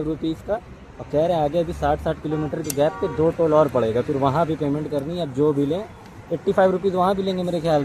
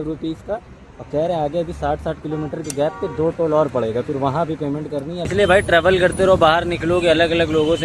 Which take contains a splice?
second; 1 cut; at 5.3 s

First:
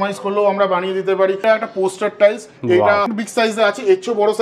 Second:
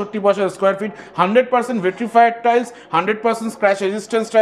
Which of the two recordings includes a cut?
first; 2 cuts; at 1.4 s, 3.1 s

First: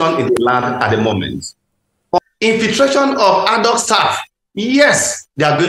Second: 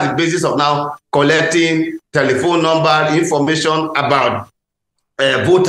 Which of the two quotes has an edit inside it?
first; 1 cut; at 2.2 s

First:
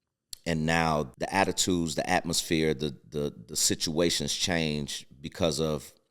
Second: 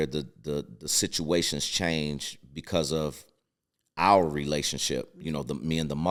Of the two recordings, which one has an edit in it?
first; 1 cut; at 1.1 s

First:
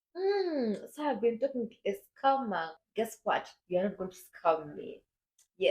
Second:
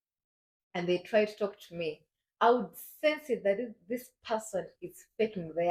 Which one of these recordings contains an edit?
first; 1 cut; at 2.8 s

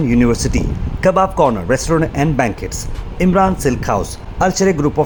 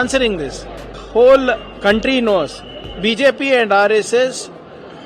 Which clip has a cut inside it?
second; 1 cut; at 1.0 s

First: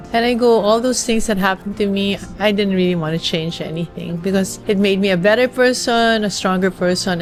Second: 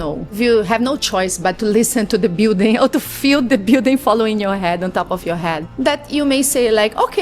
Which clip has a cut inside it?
second; 1 cut; at 5.7 s

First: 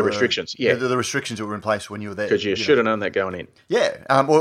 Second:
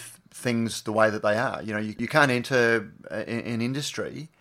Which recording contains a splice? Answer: second; 1 cut; at 2.0 s

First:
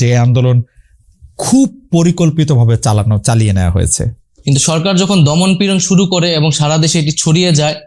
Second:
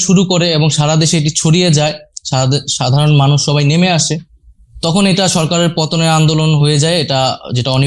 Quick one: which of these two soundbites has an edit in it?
first; 1 cut; at 4.2 s

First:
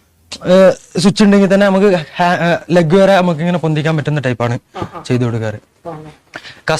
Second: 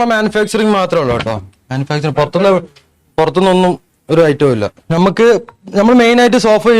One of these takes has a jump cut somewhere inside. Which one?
second; 1 cut; at 4.8 s

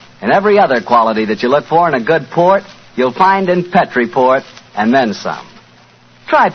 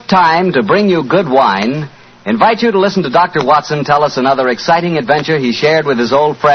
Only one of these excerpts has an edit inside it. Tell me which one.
first; 1 cut; at 3.1 s

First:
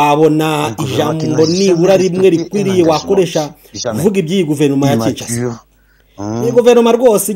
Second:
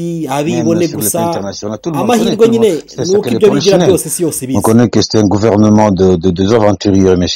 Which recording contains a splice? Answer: second; 1 cut; at 4.5 s

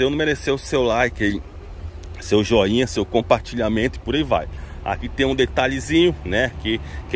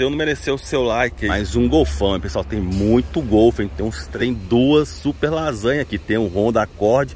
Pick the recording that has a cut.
second; 2 cuts; at 1.2 s, 4.1 s

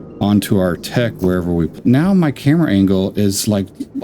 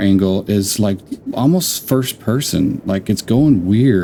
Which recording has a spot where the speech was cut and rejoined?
first; 1 cut; at 1.8 s

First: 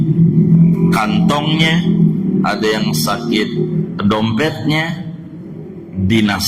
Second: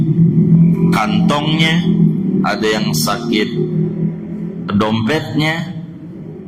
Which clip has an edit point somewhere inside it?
first; 1 cut; at 3.9 s

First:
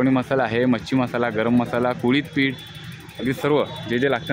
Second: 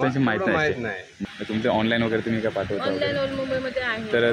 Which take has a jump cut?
second; 1 cut; at 1.2 s

